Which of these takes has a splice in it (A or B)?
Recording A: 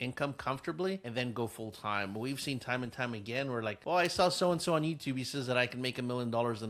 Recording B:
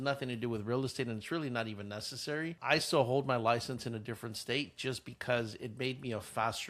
A